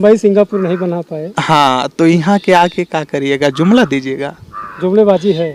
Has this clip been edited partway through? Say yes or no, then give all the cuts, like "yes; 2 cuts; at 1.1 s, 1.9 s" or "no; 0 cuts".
no; 0 cuts